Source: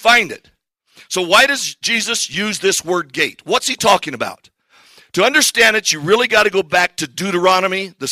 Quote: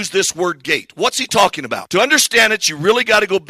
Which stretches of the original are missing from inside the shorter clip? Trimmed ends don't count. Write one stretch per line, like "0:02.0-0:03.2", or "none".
0:04.3-0:05.0